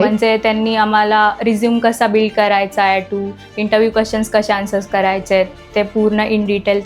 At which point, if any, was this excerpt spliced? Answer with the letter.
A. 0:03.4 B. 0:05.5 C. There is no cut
C